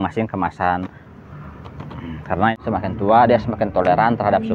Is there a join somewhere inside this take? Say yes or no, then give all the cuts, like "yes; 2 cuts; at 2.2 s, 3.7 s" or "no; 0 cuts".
yes; 1 cut; at 2.5 s